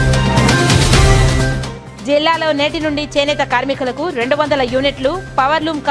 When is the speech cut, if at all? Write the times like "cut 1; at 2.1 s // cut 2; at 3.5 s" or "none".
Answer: cut 1; at 1.6 s